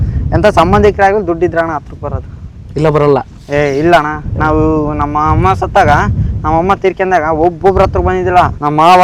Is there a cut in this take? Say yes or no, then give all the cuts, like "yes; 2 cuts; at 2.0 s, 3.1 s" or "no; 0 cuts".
no; 0 cuts